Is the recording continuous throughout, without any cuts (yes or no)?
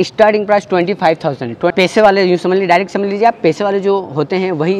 no